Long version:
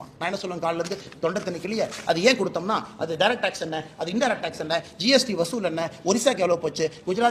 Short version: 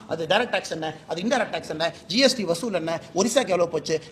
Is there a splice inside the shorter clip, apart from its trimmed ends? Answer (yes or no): no